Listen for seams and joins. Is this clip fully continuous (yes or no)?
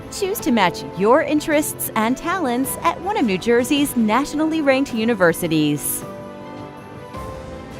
no